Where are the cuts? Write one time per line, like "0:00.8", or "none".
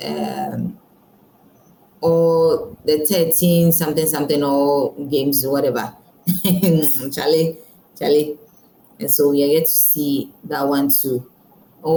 none